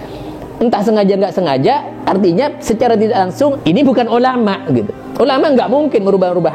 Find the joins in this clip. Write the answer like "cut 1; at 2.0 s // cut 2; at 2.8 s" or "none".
none

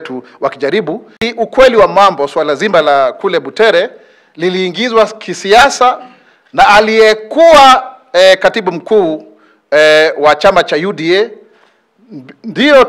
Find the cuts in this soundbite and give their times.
cut 1; at 1.2 s

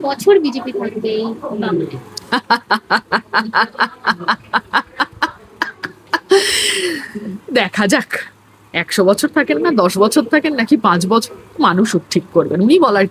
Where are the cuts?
none

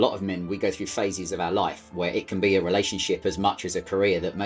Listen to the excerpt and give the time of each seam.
none

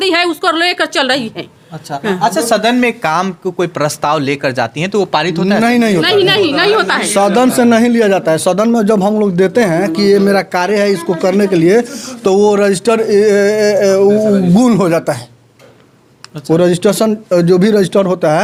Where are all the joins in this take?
none

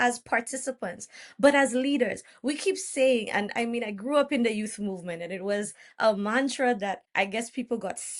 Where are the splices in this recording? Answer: cut 1; at 7.0 s

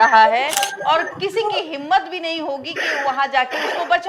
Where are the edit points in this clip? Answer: none

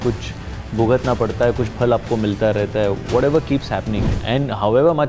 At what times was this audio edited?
cut 1; at 4.1 s

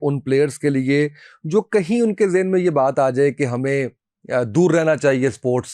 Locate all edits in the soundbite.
none

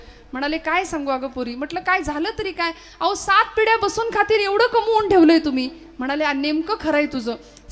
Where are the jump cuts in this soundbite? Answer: none

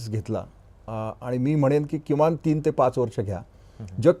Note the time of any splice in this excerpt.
none

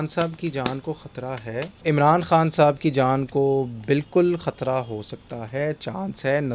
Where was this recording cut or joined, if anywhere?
cut 1; at 1.8 s

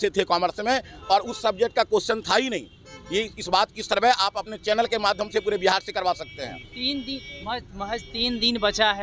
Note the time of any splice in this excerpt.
none

